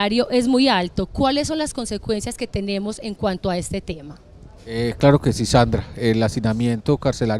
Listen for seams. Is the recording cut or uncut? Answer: cut